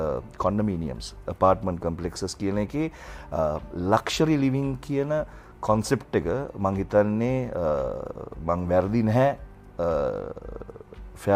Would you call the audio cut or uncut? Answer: uncut